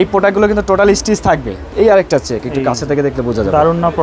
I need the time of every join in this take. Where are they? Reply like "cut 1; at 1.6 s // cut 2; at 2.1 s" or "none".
cut 1; at 1.6 s